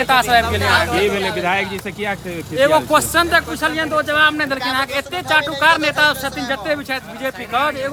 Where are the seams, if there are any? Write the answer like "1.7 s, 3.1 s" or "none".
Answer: none